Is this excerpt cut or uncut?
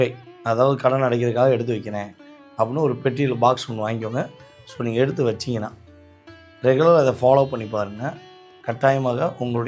uncut